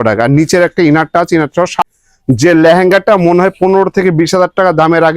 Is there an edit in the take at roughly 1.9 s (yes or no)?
yes